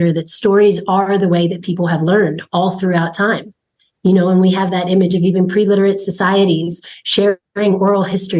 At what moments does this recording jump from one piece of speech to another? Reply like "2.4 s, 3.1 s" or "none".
none